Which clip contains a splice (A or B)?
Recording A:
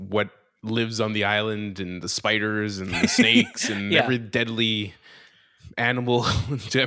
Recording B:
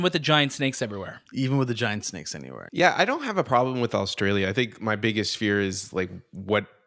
B